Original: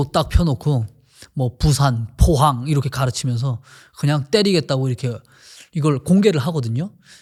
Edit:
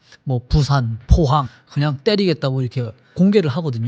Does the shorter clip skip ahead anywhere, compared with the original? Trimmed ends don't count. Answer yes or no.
yes